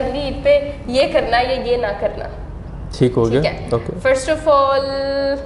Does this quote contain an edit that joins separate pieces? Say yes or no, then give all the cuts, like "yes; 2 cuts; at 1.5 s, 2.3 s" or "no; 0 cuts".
no; 0 cuts